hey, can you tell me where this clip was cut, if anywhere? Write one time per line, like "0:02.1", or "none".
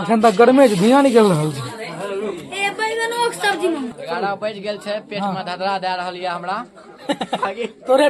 0:04.0